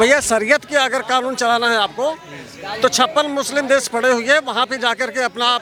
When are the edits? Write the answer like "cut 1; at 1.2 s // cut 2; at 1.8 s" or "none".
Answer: none